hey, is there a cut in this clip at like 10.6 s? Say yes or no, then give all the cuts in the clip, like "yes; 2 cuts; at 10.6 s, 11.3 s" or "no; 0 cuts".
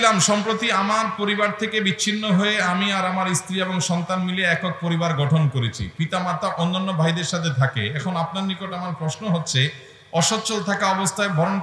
no; 0 cuts